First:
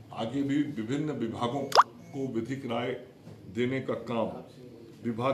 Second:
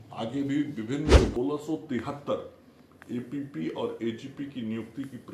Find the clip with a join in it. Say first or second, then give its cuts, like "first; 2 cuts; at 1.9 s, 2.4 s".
second; 1 cut; at 1.4 s